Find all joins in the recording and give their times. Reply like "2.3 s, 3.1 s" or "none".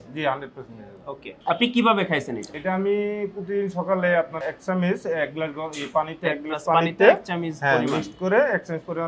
2.5 s